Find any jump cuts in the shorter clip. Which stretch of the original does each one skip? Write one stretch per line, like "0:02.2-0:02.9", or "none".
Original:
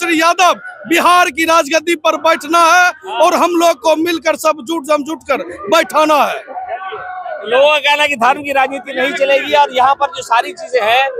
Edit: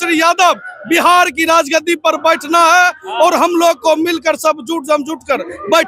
none